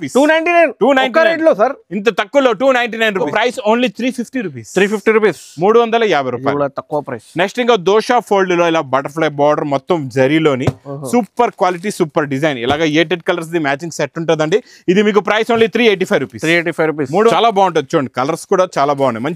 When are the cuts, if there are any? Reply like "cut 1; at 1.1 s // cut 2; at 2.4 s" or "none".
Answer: cut 1; at 3.3 s // cut 2; at 17.3 s